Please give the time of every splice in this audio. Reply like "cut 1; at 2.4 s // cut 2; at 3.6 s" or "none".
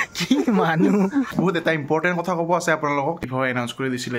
cut 1; at 1.4 s // cut 2; at 3.3 s